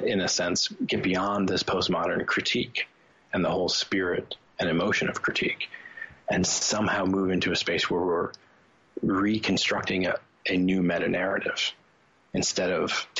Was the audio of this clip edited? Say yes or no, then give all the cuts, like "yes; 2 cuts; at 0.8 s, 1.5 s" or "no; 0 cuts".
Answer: no; 0 cuts